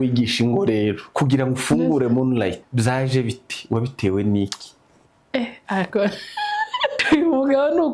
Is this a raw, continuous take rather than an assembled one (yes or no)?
no